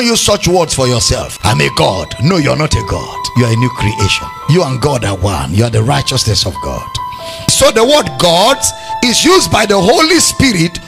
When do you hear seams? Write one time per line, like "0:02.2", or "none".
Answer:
0:01.3
0:03.2
0:04.3